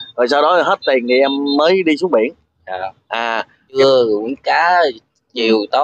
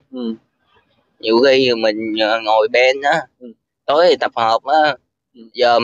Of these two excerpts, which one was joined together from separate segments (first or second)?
first